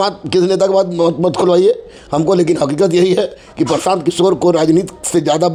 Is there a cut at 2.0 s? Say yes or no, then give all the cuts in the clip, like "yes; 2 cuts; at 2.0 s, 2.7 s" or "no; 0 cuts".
no; 0 cuts